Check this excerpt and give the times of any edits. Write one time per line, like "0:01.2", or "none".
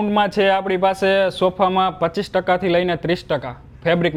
none